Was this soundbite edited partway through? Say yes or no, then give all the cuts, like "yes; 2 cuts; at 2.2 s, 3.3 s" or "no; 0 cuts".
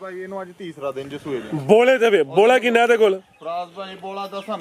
no; 0 cuts